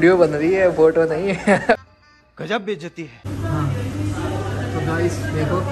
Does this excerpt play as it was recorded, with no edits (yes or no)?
no